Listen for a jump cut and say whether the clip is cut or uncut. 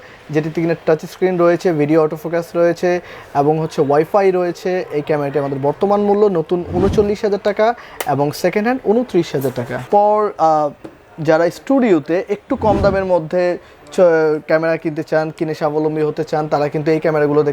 cut